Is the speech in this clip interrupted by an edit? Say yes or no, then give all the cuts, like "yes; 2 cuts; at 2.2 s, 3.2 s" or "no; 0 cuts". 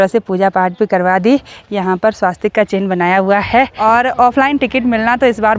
yes; 1 cut; at 3.7 s